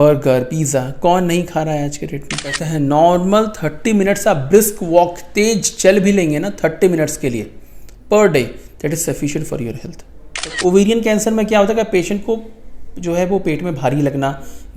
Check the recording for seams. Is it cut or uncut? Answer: cut